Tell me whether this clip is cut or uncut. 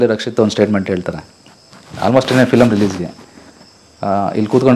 uncut